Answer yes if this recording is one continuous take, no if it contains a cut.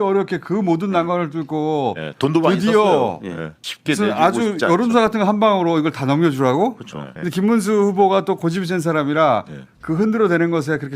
no